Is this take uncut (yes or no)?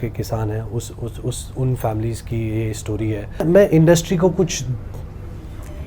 no